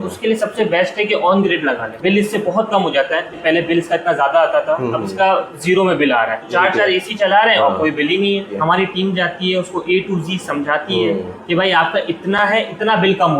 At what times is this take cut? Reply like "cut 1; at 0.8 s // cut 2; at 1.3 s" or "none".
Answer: cut 1; at 1.9 s // cut 2; at 3.4 s // cut 3; at 6.4 s // cut 4; at 8.6 s